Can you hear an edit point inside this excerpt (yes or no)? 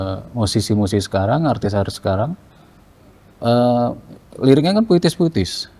no